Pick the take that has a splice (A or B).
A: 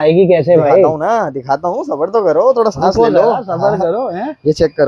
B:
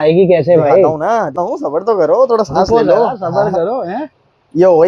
B